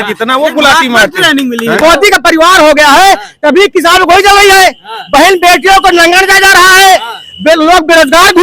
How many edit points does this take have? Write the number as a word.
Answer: one